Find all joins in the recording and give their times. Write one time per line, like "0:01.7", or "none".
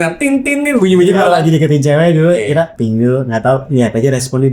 0:02.7